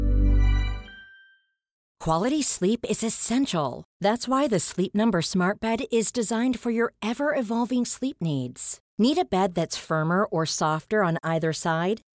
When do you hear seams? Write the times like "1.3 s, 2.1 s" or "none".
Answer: 1.9 s